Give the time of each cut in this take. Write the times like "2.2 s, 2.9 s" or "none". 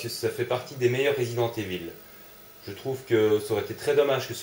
2.7 s